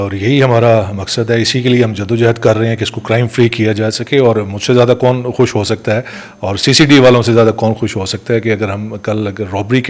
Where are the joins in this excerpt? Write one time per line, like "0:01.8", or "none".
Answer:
none